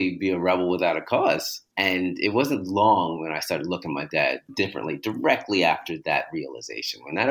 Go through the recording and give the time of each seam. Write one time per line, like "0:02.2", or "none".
0:01.5
0:04.5